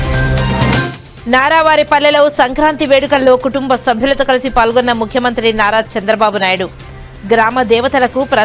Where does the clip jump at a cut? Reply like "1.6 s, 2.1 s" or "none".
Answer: 1.0 s